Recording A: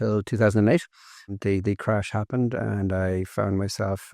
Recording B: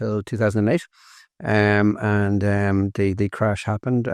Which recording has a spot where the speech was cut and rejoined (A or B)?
A